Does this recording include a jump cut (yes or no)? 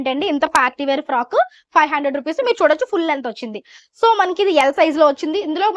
no